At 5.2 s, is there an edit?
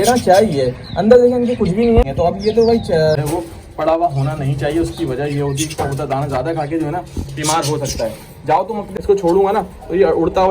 no; 2 cuts; at 3.2 s, 8.9 s

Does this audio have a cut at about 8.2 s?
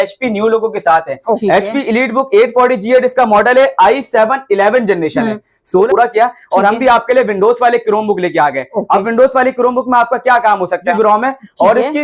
no; 3 cuts; at 1.4 s, 5.8 s, 10.9 s

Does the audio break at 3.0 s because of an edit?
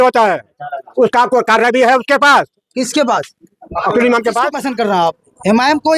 no; 1 cut; at 4.6 s

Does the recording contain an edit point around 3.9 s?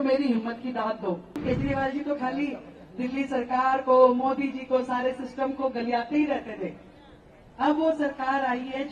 no; 1 cut; at 1.4 s

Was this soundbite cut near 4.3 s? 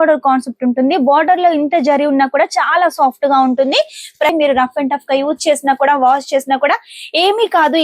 yes; 1 cut; at 4.3 s

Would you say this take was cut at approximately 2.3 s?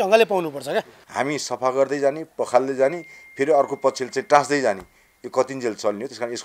no; 1 cut; at 1.0 s

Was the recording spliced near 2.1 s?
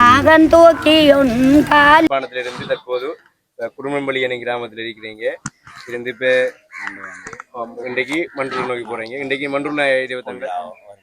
yes; 1 cut; at 2.1 s

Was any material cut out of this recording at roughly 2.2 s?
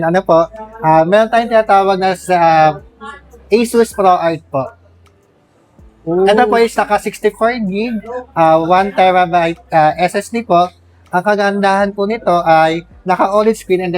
no; 0 cuts

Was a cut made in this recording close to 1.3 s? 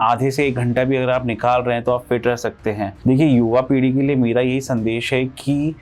no; 1 cut; at 2.9 s

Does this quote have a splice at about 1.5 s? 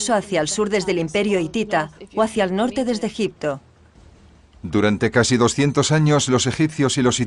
yes; 1 cut; at 1.5 s

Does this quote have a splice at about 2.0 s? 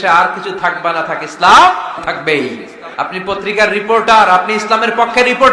yes; 2 cuts; at 2.0 s, 2.9 s

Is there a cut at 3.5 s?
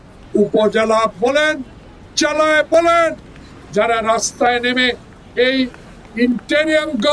yes; 1 cut; at 3.5 s

